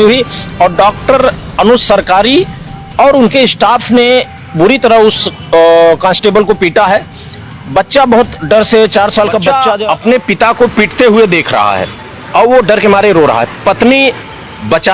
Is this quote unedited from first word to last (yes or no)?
no